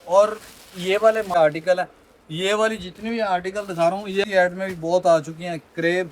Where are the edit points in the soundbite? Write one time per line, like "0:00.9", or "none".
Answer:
0:01.4
0:04.2